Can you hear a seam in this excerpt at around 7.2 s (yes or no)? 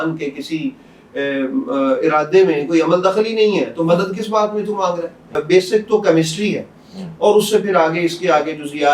no